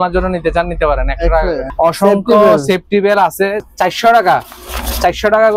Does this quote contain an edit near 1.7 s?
yes; 2 cuts; at 1.7 s, 3.7 s

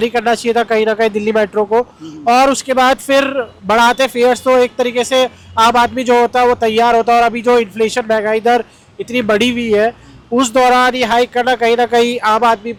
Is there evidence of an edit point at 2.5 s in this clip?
no; 0 cuts

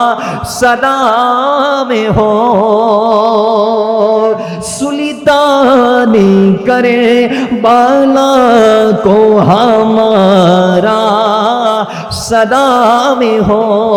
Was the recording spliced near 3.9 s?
no; 0 cuts

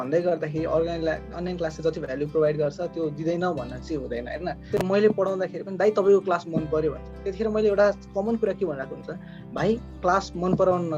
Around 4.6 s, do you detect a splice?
yes; 1 cut; at 4.6 s

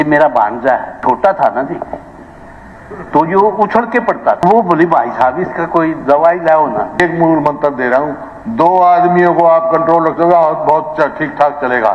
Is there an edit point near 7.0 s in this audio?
yes; 3 cuts; at 1.0 s, 4.4 s, 7.0 s

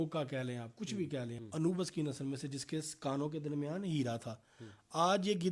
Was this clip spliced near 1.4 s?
yes; 1 cut; at 1.4 s

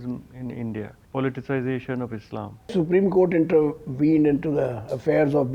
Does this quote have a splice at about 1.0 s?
yes; 2 cuts; at 1.0 s, 2.7 s

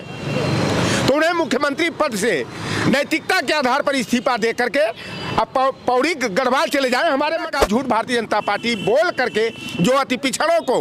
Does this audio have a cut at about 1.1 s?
no; 1 cut; at 7.5 s

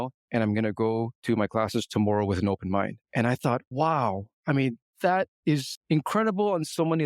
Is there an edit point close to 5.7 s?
yes; 2 cuts; at 1.1 s, 5.7 s

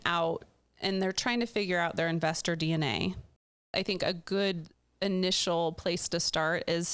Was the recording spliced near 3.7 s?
yes; 1 cut; at 3.7 s

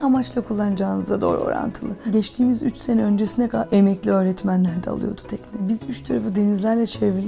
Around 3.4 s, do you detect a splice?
no; 2 cuts; at 2.1 s, 5.5 s

